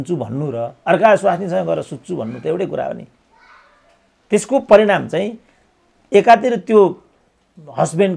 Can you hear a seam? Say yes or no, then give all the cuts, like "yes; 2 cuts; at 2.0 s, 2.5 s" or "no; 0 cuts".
no; 0 cuts